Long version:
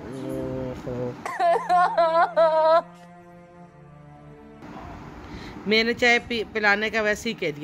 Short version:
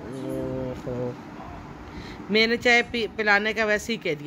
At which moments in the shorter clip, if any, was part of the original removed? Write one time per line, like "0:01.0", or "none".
0:01.2